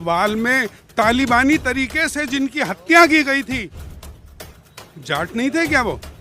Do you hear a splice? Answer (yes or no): no